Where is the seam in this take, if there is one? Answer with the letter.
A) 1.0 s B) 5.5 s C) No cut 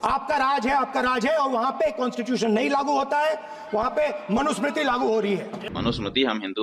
B